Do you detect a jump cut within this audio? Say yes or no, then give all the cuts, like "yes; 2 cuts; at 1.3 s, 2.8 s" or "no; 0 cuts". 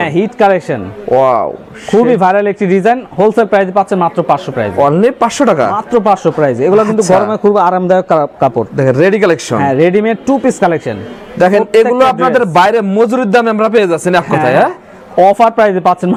no; 0 cuts